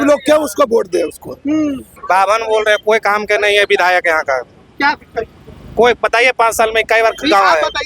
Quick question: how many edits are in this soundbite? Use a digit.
1